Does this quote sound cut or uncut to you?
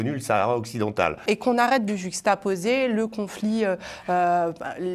cut